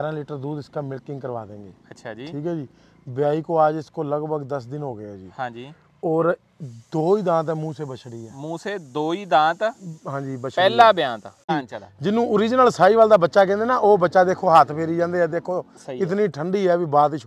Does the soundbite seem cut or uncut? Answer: cut